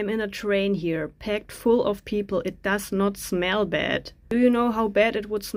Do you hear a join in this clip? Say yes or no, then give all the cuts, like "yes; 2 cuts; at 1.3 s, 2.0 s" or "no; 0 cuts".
no; 0 cuts